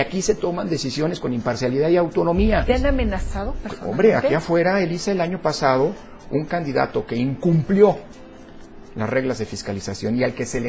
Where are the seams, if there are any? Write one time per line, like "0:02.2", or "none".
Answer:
0:02.6